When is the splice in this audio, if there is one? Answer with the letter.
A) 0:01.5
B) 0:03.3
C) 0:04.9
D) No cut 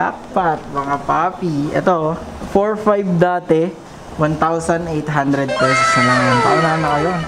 D